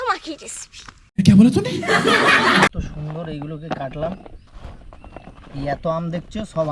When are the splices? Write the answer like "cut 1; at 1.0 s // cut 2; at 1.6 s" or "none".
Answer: cut 1; at 2.9 s